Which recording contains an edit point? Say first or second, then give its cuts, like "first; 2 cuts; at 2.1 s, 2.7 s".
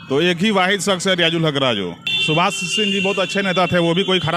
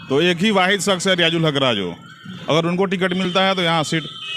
first; 1 cut; at 2.1 s